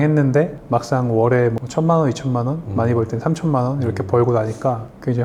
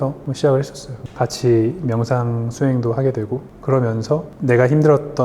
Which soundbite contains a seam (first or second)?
second